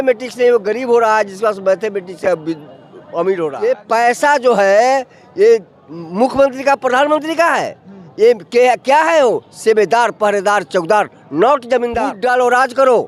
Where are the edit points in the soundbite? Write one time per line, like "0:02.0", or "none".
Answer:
0:03.6
0:12.1